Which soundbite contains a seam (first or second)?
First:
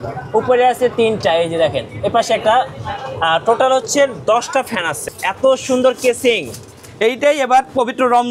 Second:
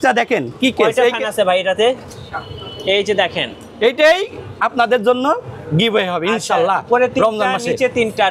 first